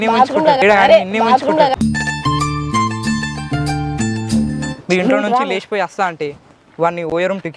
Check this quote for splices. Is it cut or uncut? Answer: cut